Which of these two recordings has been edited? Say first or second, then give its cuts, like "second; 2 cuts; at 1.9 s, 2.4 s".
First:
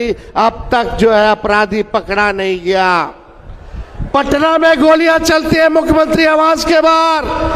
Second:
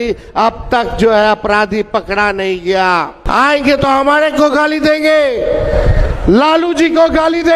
second; 1 cut; at 3.2 s